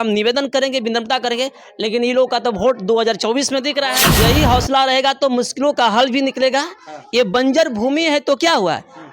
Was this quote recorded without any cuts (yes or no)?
no